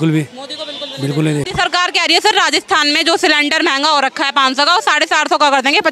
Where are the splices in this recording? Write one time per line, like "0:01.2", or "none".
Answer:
0:01.5